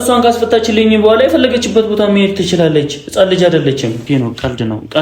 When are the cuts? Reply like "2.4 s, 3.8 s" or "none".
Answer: 4.0 s